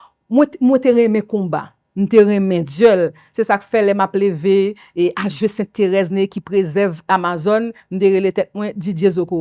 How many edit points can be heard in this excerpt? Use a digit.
0